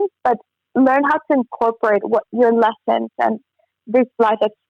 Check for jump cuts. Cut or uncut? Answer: uncut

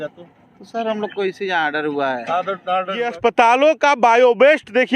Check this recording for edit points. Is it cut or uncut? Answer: cut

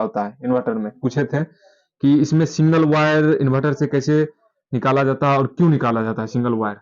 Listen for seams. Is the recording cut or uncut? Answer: cut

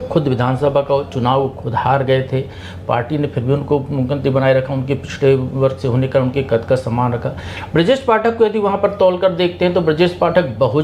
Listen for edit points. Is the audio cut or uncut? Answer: uncut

